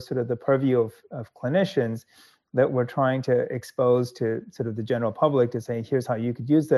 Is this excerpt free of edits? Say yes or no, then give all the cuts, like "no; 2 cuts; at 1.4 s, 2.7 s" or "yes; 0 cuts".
yes; 0 cuts